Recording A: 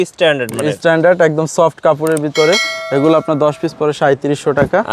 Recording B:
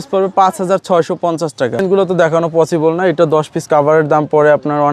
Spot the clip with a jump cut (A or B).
B